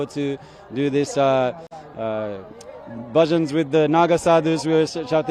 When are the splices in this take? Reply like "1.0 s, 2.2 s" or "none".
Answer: none